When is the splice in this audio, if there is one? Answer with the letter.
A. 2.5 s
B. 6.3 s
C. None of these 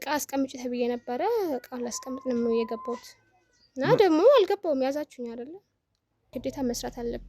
B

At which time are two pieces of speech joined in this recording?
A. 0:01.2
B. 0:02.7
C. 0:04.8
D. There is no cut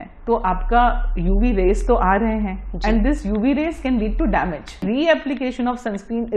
C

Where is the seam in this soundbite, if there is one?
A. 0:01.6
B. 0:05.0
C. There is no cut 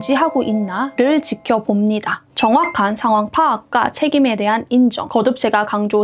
B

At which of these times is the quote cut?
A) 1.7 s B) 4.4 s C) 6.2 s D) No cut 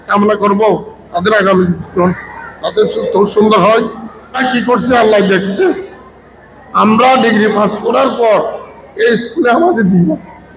B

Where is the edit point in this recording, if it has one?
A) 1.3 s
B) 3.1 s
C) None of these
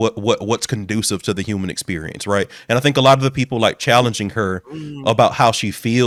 C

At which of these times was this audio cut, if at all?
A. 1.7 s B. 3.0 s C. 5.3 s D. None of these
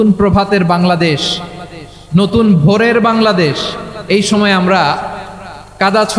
D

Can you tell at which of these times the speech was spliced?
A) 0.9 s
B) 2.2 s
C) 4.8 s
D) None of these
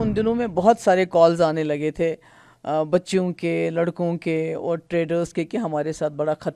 D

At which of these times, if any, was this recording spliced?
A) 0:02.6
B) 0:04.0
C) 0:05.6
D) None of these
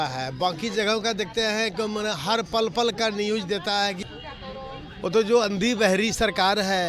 B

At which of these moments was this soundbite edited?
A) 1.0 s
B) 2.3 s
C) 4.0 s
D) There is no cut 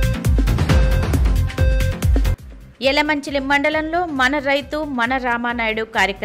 A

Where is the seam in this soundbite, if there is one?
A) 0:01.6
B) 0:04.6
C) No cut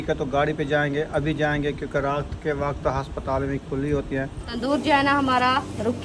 B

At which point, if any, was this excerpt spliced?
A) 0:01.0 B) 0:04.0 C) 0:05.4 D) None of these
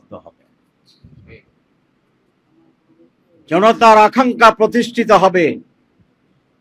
D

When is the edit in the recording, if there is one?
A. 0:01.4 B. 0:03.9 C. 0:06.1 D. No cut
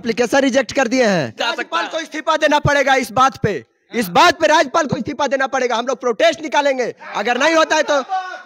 A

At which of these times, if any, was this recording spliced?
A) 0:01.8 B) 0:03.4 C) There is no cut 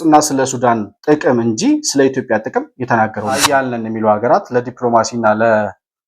B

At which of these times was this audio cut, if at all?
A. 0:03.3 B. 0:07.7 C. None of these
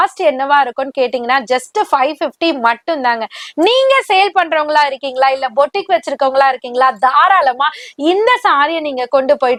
C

